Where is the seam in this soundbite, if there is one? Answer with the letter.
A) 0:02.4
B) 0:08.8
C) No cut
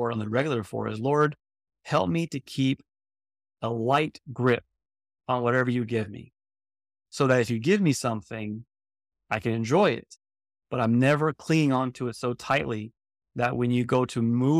C